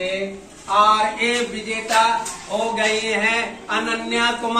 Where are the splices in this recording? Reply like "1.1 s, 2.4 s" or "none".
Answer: none

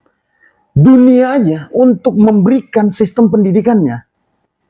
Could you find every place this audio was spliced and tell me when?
none

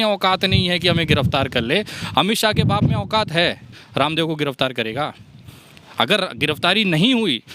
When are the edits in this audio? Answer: none

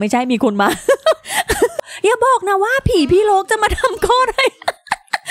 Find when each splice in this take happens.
1.8 s

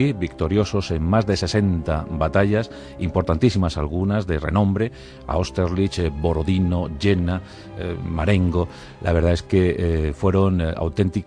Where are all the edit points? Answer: 5.2 s

